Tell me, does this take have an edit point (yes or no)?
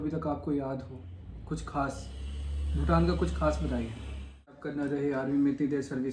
yes